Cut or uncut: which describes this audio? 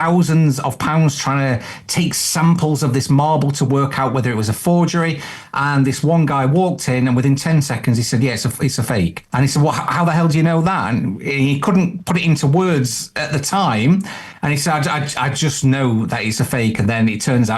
cut